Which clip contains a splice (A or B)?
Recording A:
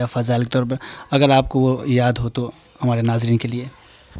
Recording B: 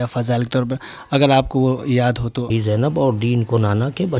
B